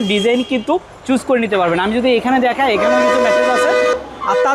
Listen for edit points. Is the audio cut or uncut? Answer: uncut